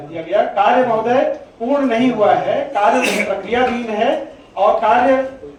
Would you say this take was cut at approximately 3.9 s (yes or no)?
no